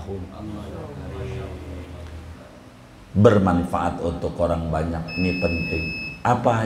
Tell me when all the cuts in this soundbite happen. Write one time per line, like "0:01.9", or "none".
0:02.3